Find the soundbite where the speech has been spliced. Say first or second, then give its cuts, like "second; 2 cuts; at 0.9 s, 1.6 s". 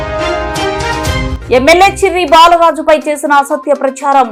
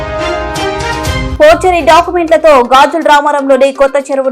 second; 1 cut; at 1.3 s